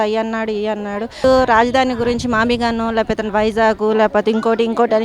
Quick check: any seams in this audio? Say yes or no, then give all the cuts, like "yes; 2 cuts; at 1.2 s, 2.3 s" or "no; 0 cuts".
yes; 1 cut; at 1.2 s